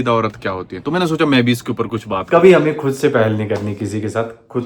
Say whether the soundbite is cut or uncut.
cut